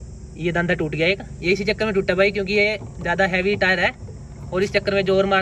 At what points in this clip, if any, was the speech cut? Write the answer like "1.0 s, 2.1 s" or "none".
none